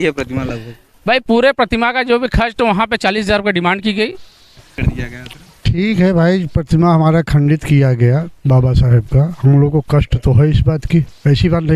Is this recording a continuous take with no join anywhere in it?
no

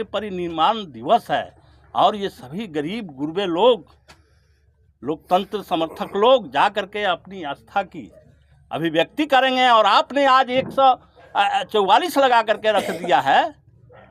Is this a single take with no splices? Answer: yes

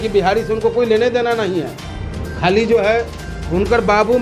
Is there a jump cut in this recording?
no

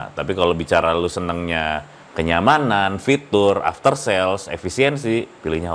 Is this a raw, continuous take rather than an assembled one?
yes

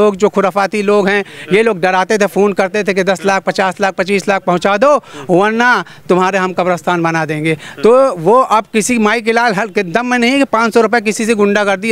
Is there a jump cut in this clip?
no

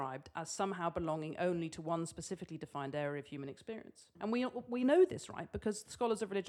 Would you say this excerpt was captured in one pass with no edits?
no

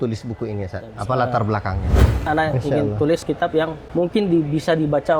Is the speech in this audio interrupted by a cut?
yes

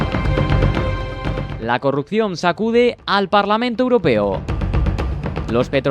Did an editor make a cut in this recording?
yes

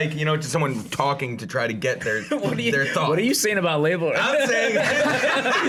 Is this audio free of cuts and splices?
yes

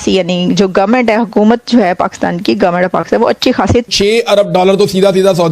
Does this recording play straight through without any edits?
no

